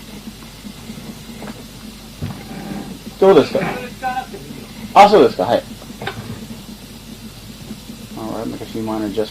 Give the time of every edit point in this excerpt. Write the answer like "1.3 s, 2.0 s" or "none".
5.2 s